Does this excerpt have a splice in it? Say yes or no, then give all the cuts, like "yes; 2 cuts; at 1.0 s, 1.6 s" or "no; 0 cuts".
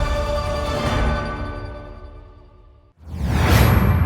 yes; 1 cut; at 2.9 s